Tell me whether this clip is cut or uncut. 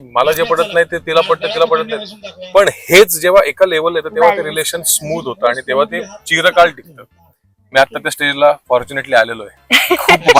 uncut